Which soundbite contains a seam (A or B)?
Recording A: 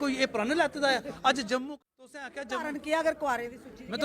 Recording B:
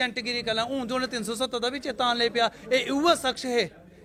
A